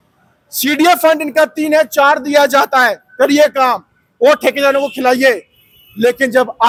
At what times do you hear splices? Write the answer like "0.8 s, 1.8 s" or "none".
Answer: none